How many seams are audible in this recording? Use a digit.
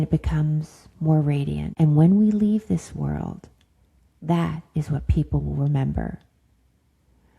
1